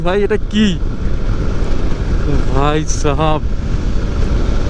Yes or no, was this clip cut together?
no